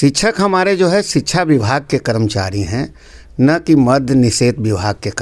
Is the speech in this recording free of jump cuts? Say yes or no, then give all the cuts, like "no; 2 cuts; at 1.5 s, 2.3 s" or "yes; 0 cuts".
yes; 0 cuts